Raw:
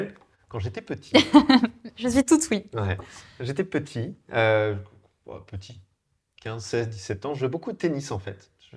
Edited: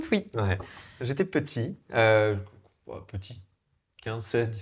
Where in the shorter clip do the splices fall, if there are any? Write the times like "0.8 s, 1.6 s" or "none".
none